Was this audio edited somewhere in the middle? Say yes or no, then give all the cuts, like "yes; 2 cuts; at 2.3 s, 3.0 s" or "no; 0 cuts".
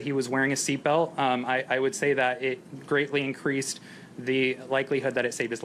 no; 0 cuts